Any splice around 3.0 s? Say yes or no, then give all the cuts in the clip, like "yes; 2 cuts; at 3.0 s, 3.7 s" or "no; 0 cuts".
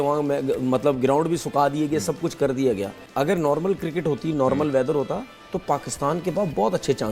yes; 1 cut; at 3.0 s